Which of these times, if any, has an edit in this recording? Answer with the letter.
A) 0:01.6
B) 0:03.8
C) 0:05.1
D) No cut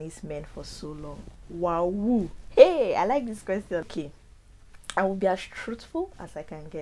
B